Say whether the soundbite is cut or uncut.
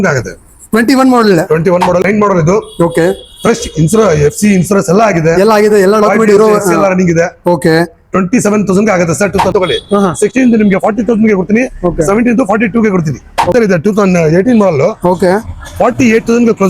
cut